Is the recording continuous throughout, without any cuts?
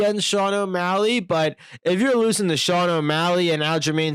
yes; 0 cuts

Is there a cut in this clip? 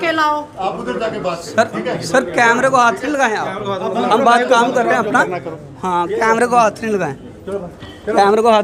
no; 0 cuts

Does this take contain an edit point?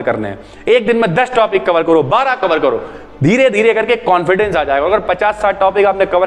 no; 0 cuts

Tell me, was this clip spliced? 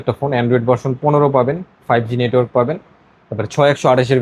no; 0 cuts

